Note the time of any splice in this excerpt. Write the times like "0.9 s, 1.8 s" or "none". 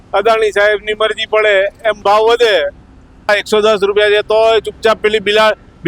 3.3 s